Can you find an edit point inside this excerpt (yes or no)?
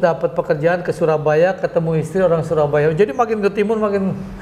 no